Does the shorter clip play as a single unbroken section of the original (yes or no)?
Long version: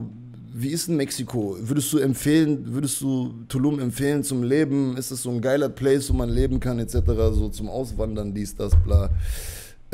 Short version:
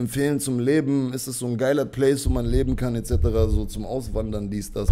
yes